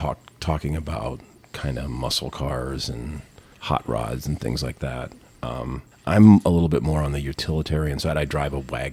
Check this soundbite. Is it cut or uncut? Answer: uncut